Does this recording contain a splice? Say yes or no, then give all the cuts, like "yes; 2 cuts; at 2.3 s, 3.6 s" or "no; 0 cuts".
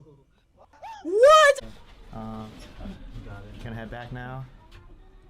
yes; 1 cut; at 1.6 s